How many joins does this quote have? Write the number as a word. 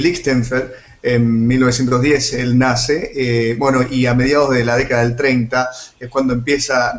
one